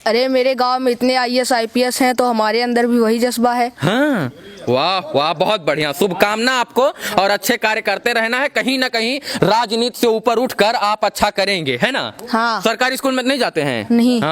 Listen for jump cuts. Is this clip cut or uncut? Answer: uncut